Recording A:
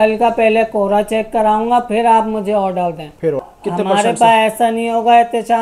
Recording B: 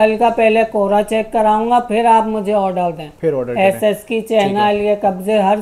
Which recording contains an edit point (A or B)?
A